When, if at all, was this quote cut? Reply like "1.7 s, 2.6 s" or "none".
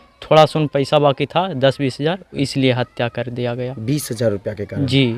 none

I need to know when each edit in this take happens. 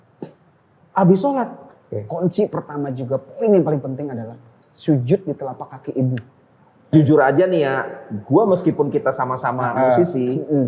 1.6 s, 6.9 s

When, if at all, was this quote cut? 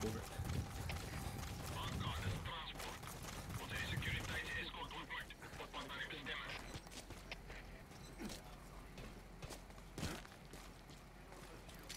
7.8 s

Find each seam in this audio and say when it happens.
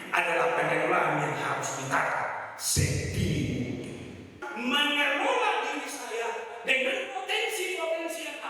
4.5 s

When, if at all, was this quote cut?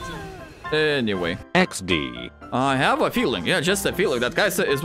1.4 s, 2.3 s

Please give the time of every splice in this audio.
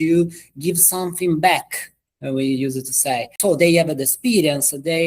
3.3 s

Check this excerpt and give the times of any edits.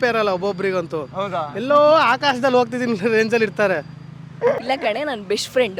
4.6 s

